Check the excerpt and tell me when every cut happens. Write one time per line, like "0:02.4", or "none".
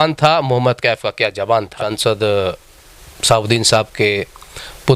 0:01.8

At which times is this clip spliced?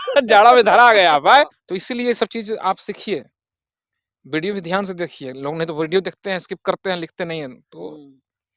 0:01.6

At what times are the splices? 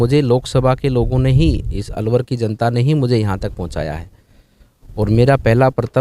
none

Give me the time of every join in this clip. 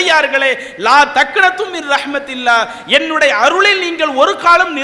none

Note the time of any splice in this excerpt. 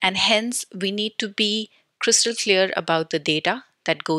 none

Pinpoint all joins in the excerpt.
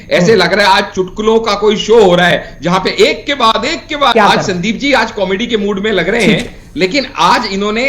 0:04.1

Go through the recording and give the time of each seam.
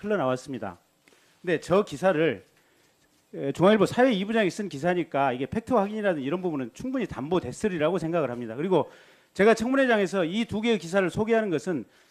none

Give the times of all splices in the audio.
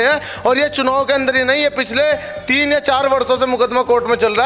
none

